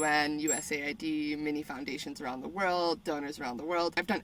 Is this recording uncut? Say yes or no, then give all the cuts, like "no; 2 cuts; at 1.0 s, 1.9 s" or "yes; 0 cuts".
yes; 0 cuts